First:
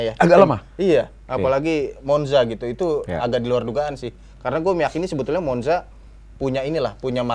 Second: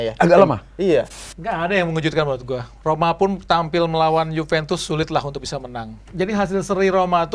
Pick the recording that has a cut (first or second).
second